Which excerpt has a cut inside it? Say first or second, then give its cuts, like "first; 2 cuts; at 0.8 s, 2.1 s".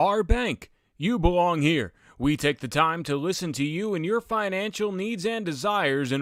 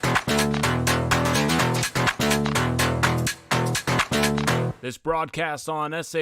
second; 1 cut; at 4.9 s